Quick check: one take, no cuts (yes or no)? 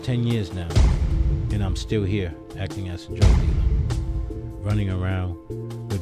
no